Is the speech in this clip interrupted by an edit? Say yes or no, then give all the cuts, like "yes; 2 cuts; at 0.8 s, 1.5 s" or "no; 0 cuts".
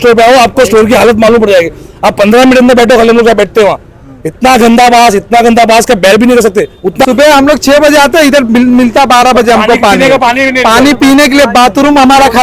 yes; 1 cut; at 7.0 s